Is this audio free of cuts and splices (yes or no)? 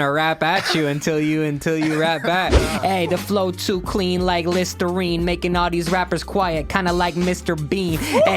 no